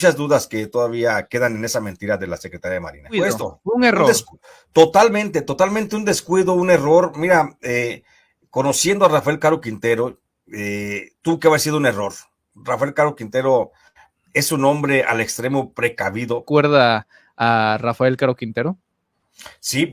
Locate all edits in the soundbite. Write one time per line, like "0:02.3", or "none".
0:03.2
0:16.5